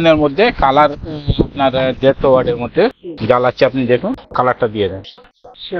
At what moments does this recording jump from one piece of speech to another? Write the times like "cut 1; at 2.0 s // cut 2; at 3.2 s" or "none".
none